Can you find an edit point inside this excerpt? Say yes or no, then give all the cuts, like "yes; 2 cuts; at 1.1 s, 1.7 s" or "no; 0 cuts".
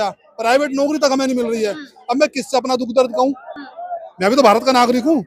no; 0 cuts